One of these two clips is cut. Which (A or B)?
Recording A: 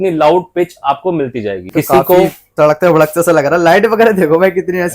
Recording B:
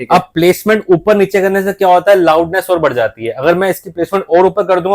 A